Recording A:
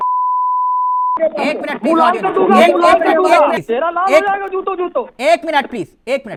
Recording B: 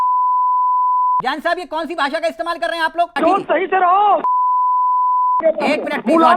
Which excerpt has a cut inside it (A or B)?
B